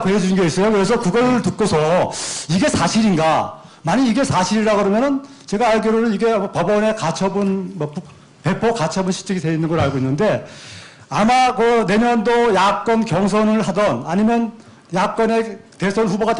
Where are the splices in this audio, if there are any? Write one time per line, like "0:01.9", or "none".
none